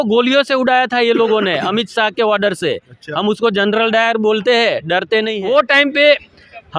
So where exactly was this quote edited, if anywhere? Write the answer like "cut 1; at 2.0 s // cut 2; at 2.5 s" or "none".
cut 1; at 5.3 s